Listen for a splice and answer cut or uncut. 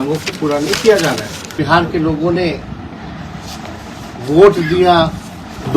cut